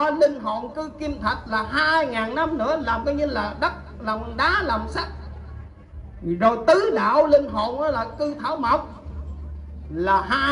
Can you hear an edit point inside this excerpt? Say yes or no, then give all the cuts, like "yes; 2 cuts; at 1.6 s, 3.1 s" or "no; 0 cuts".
no; 0 cuts